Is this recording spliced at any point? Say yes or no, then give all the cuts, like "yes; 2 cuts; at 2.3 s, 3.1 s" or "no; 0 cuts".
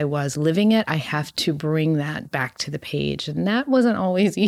no; 0 cuts